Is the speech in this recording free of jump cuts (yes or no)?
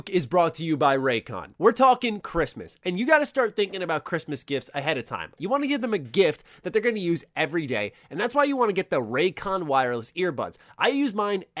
no